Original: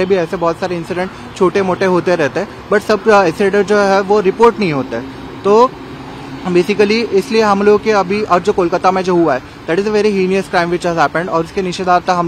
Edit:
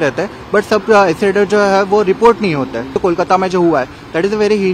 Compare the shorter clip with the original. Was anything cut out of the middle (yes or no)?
yes